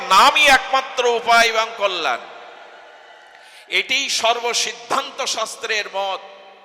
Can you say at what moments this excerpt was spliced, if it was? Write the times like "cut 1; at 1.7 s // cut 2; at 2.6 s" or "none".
none